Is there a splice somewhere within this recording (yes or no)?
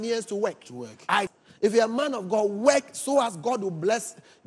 yes